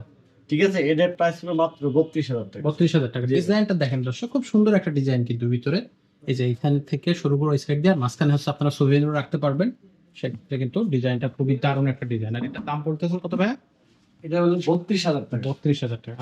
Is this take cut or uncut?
uncut